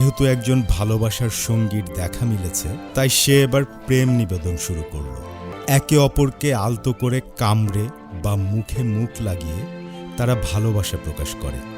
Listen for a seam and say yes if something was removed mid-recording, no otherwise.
yes